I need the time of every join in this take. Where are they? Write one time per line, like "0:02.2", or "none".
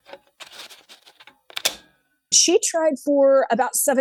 0:02.3